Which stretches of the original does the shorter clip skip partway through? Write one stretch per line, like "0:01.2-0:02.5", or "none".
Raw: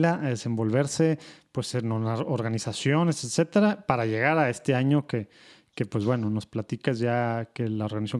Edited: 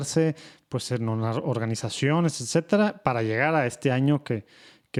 none